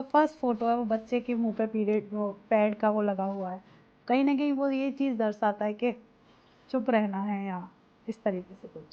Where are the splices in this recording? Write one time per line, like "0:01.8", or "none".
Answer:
none

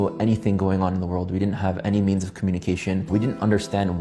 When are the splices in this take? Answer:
0:03.0

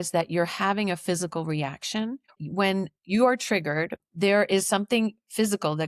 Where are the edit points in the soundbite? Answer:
0:02.4
0:04.0

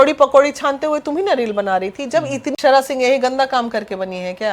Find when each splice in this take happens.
0:02.5

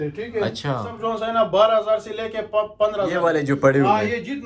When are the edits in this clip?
0:00.9
0:03.2

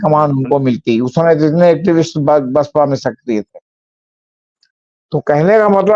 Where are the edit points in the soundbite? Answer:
none

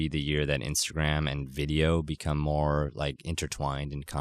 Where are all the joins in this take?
none

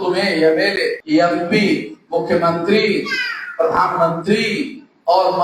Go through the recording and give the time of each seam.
0:01.0
0:02.0

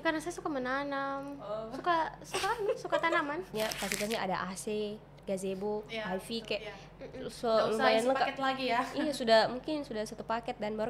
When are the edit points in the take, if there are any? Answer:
0:03.5

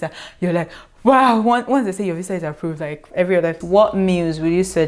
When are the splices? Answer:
0:03.6

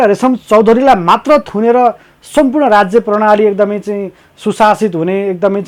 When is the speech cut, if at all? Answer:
none

